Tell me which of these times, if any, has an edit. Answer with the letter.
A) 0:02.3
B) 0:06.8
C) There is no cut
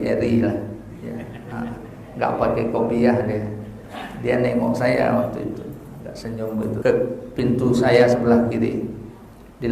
B